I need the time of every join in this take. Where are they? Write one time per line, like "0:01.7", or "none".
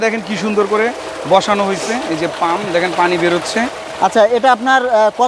none

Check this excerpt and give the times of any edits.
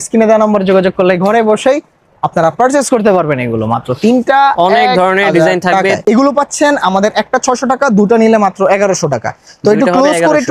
0:06.0

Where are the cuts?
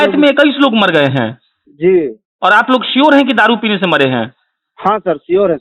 none

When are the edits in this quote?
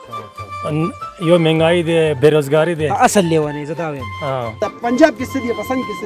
0:04.6

